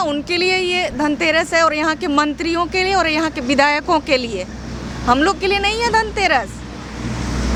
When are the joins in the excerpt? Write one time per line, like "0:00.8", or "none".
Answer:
none